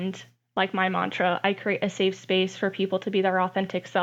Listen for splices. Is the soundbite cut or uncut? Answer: uncut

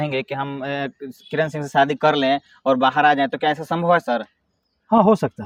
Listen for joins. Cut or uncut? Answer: uncut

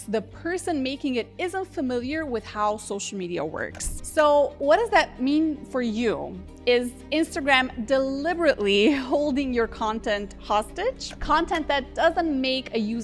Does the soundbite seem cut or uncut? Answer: cut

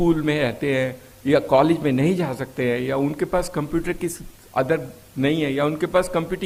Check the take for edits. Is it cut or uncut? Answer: uncut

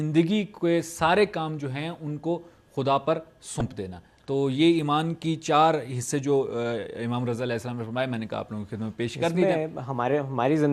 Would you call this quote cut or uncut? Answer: cut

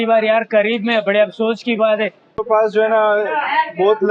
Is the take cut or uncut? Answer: cut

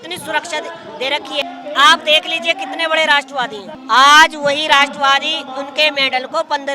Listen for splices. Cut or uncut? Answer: cut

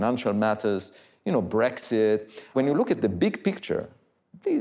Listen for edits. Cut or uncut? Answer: cut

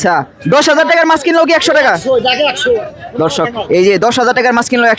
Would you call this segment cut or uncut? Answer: uncut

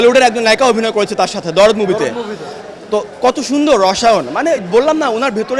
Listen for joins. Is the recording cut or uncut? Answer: uncut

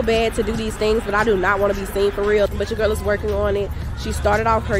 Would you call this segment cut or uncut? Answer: cut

